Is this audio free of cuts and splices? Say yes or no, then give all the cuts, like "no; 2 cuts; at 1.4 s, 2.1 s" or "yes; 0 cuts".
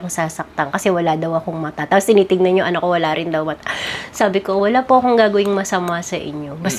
yes; 0 cuts